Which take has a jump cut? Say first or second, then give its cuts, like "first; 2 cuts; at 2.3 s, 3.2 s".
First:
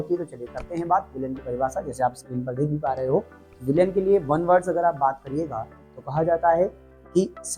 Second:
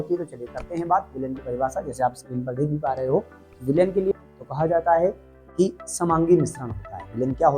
second; 1 cut; at 4.1 s